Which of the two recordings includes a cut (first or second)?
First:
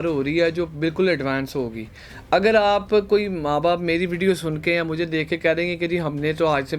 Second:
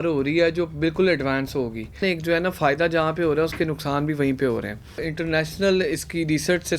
second